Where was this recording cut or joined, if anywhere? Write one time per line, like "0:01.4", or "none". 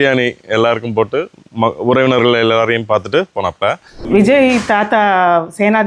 0:03.9